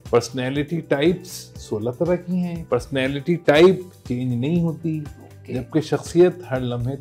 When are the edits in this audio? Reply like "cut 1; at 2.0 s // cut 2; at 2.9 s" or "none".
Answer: cut 1; at 2.6 s